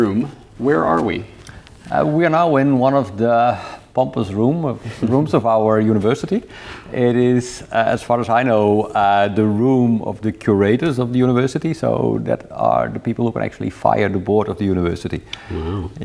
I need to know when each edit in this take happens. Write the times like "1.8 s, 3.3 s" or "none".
none